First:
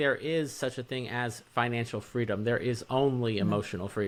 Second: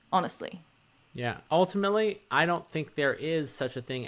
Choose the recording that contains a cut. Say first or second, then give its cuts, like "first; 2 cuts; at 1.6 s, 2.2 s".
second; 1 cut; at 1.4 s